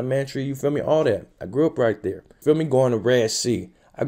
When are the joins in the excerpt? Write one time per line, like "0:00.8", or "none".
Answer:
none